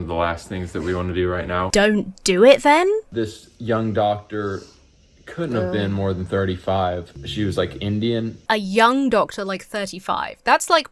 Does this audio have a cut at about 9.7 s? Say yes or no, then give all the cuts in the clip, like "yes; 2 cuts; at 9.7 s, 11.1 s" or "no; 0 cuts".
no; 4 cuts; at 1.7 s, 3.1 s, 7.2 s, 8.4 s